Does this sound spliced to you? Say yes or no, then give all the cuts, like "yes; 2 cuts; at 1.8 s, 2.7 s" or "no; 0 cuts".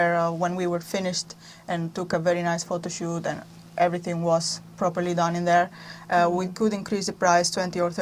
no; 0 cuts